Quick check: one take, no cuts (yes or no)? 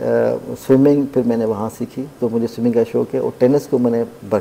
yes